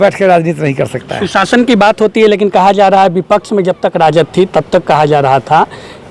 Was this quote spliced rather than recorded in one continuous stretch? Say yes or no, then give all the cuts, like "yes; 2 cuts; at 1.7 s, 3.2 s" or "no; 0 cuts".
no; 0 cuts